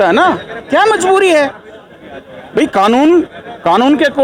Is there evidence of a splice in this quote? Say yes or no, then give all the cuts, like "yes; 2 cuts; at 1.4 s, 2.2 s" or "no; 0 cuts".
no; 0 cuts